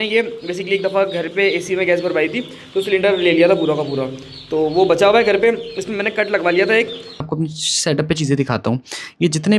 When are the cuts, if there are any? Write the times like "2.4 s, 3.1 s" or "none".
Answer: 7.3 s